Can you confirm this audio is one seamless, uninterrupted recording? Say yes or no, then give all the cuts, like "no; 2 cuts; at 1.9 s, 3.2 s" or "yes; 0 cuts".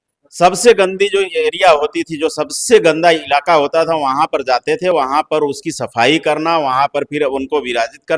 yes; 0 cuts